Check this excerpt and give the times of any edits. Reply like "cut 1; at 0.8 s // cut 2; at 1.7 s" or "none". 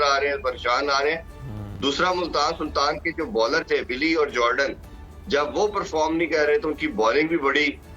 none